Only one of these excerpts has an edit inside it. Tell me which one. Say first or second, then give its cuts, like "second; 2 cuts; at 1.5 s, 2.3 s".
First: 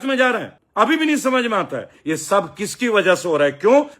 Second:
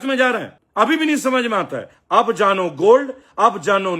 first; 1 cut; at 1.9 s